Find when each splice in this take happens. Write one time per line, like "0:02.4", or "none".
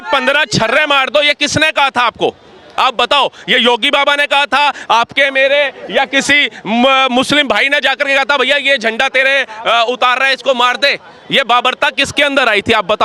none